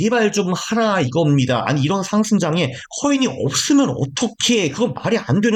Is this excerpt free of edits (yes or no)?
yes